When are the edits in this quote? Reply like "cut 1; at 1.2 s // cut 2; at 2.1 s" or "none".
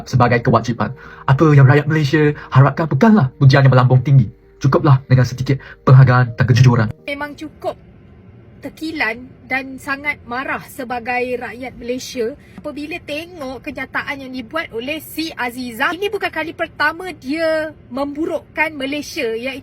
cut 1; at 7.0 s